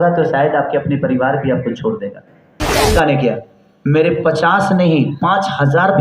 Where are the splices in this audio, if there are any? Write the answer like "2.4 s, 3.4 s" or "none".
2.9 s